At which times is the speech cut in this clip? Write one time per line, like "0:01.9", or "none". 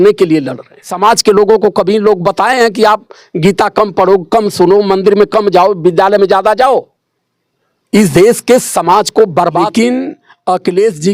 0:00.9
0:09.7